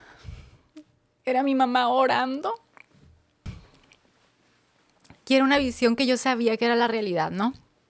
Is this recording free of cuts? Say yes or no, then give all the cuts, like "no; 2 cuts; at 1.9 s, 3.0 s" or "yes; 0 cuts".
no; 1 cut; at 3.5 s